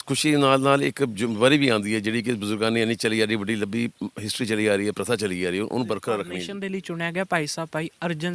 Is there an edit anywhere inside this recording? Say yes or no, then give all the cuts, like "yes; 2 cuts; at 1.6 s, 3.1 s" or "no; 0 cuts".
yes; 1 cut; at 6.5 s